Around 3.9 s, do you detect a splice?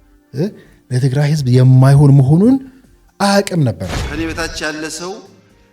yes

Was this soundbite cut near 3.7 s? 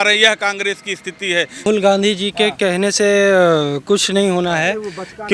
no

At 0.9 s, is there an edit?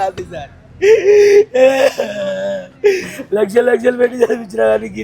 no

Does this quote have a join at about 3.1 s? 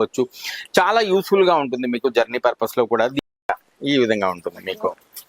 yes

